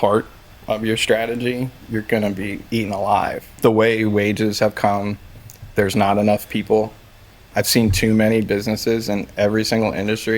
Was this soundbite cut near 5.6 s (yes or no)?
no